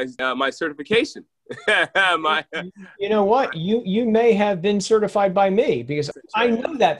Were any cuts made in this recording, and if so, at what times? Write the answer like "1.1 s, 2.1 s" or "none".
6.1 s

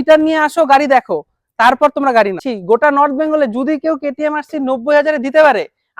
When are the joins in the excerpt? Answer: 2.5 s

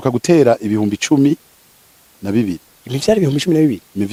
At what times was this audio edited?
none

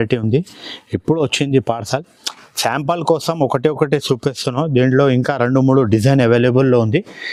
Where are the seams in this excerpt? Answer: none

